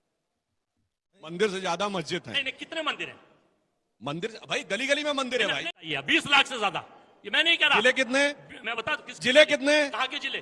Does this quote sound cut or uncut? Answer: cut